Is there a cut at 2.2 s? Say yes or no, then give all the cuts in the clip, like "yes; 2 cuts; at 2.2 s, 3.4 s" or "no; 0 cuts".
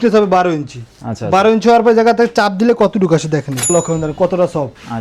no; 1 cut; at 3.7 s